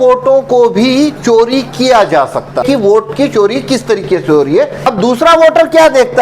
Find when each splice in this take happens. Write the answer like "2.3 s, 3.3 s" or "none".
2.6 s, 4.9 s